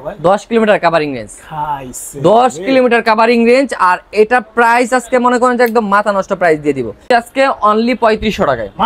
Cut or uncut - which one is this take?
cut